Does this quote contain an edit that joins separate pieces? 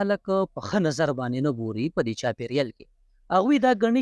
no; 0 cuts

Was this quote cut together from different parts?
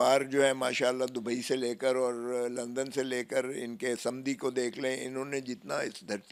no; 0 cuts

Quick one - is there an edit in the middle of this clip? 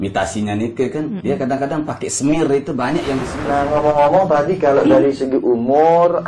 yes; 1 cut; at 3.3 s

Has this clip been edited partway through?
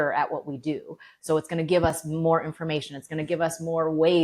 no; 0 cuts

